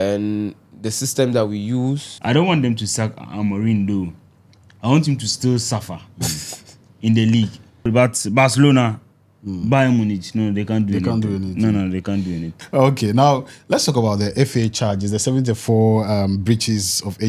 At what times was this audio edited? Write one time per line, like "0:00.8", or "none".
0:02.1
0:07.9
0:12.5